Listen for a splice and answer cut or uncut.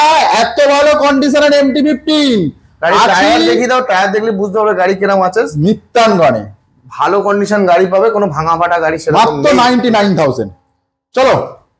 uncut